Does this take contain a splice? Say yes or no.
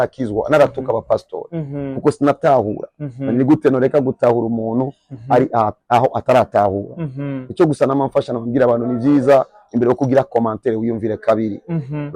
no